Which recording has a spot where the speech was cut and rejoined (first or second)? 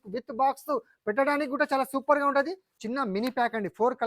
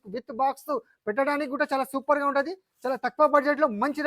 first